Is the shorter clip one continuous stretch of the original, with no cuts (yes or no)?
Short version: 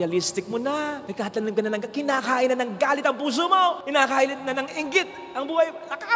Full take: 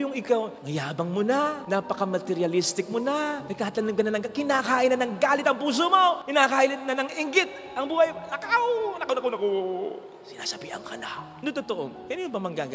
yes